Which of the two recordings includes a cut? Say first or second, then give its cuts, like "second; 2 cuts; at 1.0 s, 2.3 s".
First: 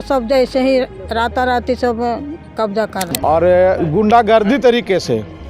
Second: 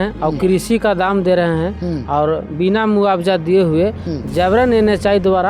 first; 1 cut; at 3.1 s